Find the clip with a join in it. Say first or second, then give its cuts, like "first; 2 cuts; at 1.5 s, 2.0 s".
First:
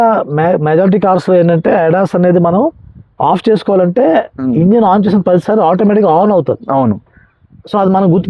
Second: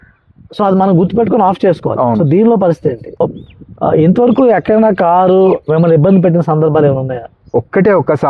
second; 2 cuts; at 3.2 s, 7.4 s